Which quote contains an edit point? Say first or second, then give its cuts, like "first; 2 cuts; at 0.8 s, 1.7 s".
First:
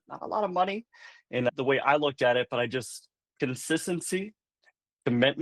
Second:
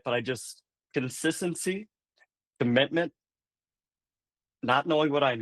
first; 1 cut; at 1.5 s